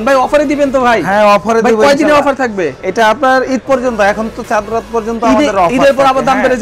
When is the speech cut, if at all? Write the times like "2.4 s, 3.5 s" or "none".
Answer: none